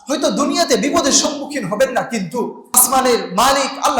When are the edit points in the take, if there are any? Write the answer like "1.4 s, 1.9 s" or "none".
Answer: 2.8 s